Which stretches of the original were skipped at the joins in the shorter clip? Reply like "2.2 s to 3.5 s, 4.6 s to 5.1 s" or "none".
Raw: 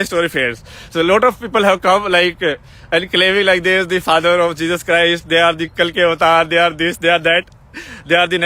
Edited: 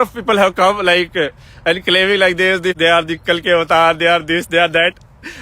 4.0 s to 5.3 s